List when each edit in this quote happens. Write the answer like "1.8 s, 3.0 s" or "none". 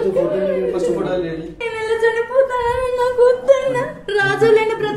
1.5 s